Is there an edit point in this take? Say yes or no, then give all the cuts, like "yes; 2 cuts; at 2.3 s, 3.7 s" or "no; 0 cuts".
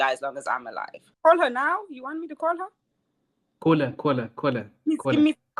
yes; 1 cut; at 1.0 s